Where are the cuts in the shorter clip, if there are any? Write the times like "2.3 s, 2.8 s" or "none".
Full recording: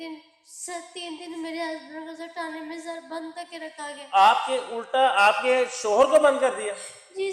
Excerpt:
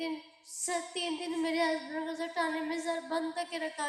none